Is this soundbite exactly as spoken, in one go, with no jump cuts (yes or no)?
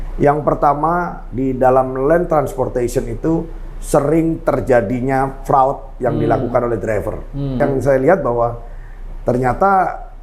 no